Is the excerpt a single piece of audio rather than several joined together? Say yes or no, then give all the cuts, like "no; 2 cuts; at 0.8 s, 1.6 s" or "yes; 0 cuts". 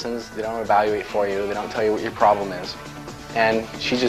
yes; 0 cuts